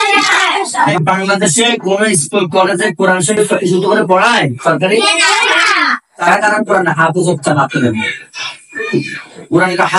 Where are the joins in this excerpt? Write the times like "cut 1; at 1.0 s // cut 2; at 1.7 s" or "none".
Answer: cut 1; at 0.9 s // cut 2; at 6.3 s